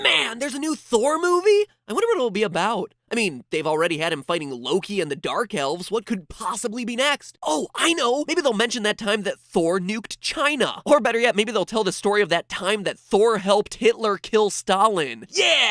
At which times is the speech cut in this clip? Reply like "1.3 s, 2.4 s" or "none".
none